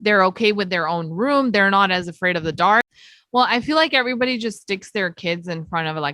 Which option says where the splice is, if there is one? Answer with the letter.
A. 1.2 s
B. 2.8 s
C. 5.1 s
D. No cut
B